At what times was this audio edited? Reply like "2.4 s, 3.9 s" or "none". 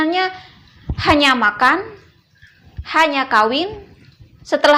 none

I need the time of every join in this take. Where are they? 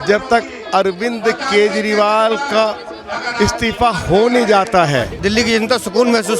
5.2 s

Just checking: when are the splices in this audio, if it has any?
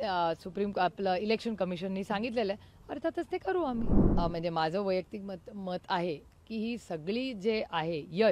4.0 s

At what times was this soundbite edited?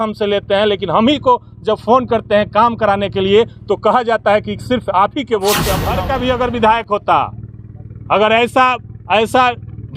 5.9 s

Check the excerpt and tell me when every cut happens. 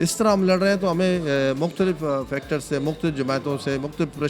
none

